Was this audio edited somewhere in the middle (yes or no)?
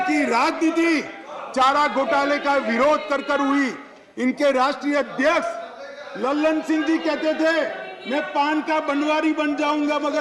no